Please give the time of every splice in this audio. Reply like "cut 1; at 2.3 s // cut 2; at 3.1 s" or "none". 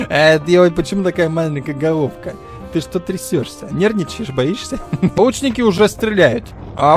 cut 1; at 5.2 s